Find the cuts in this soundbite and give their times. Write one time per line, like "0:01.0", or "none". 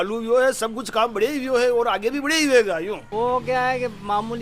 0:03.0